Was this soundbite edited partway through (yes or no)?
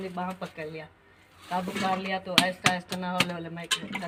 no